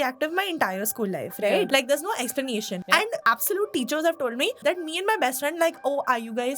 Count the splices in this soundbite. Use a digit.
3